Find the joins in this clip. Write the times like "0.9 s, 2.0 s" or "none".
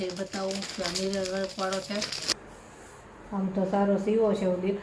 2.2 s